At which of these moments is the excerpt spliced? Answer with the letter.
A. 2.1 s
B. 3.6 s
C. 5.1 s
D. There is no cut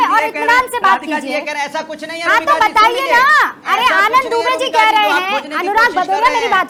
D